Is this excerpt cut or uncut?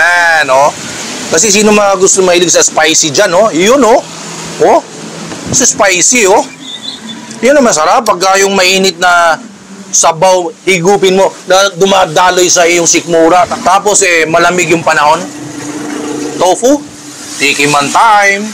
uncut